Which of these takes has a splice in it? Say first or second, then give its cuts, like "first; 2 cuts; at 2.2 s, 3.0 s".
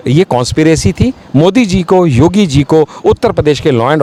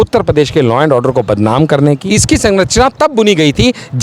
second; 1 cut; at 2.0 s